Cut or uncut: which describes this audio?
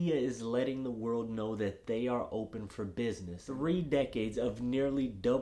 cut